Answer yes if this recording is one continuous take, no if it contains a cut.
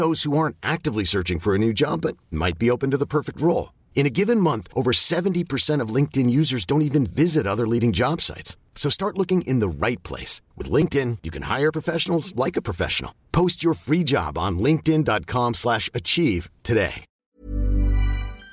no